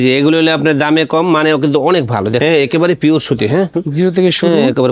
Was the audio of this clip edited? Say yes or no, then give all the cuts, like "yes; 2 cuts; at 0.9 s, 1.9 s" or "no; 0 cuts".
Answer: yes; 2 cuts; at 2.4 s, 3.8 s